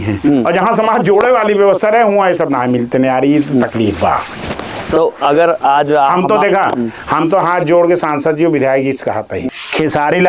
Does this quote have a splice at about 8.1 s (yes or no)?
no